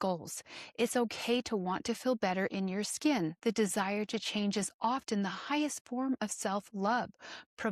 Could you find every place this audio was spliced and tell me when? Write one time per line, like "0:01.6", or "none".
0:03.4